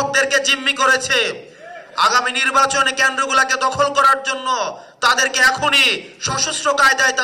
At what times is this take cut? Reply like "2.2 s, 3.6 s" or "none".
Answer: none